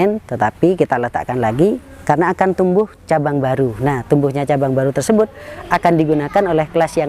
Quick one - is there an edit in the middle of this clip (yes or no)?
no